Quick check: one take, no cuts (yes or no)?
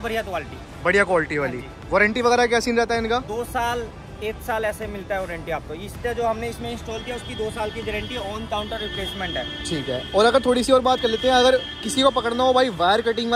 yes